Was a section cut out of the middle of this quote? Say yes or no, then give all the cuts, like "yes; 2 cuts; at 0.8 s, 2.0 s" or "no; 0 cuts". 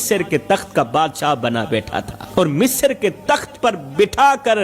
yes; 1 cut; at 2.2 s